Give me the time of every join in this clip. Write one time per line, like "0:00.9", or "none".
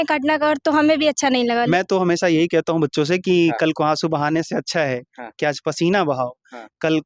0:01.7